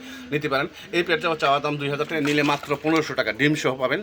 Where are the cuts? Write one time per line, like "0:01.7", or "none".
none